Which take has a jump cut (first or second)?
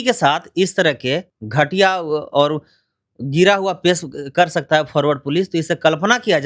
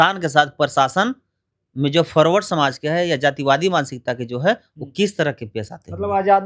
first